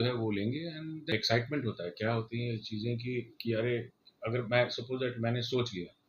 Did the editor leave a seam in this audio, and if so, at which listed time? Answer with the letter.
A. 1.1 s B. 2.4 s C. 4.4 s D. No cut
A